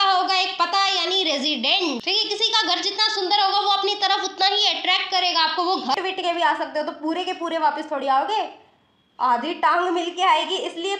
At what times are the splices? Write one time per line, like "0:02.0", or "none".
0:02.0
0:06.0